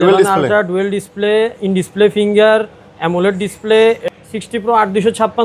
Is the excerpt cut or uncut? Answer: cut